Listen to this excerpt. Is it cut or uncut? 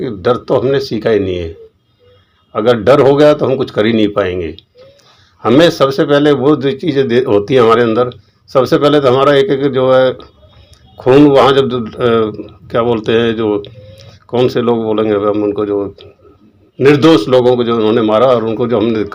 uncut